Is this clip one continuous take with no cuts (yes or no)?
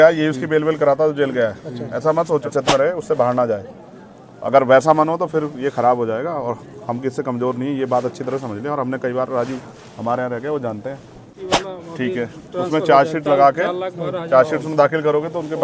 no